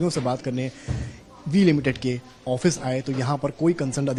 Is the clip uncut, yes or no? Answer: yes